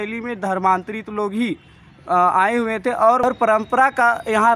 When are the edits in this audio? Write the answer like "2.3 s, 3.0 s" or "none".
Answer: 3.2 s